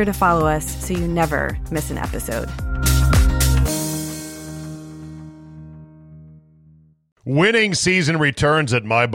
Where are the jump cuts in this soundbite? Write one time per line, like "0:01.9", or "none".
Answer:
0:07.0